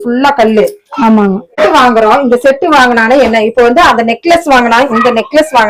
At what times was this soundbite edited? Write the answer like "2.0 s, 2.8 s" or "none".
1.6 s